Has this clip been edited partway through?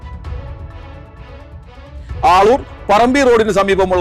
yes; 1 cut; at 2.1 s

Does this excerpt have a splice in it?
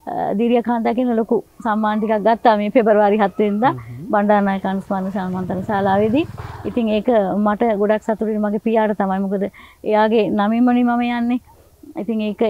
no; 0 cuts

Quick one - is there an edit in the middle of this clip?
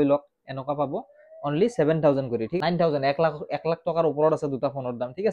yes; 1 cut; at 2.5 s

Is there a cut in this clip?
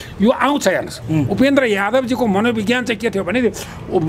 yes; 1 cut; at 1.0 s

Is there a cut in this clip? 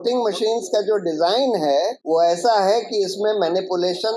yes; 1 cut; at 2.0 s

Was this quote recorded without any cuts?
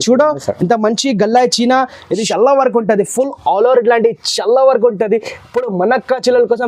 no; 1 cut; at 2.2 s

